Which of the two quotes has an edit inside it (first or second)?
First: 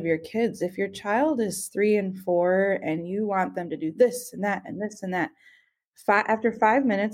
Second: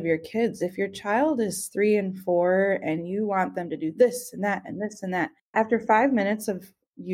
second